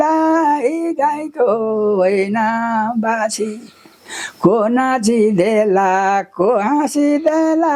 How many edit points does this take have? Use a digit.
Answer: 0